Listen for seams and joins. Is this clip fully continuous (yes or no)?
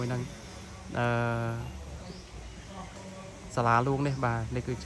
yes